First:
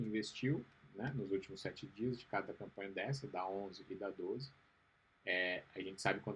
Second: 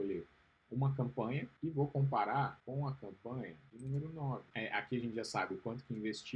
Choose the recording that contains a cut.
second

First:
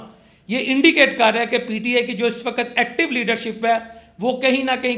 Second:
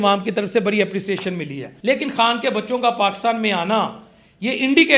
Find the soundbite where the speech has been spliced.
second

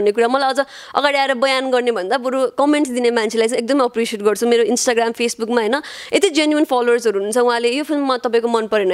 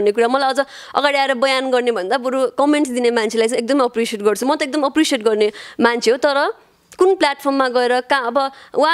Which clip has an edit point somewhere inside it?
second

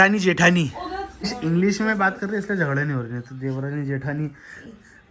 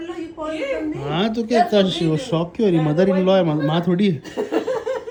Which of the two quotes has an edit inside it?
first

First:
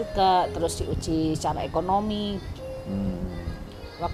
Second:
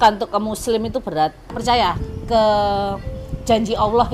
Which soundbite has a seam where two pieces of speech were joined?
second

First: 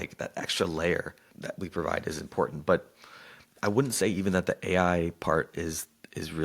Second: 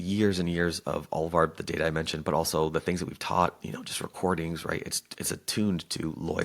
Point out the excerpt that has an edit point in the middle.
first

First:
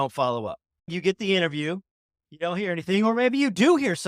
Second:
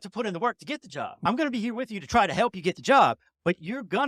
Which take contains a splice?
first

